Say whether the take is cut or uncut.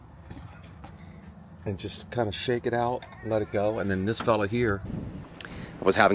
cut